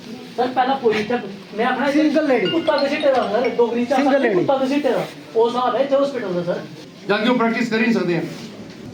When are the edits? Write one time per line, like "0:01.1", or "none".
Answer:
none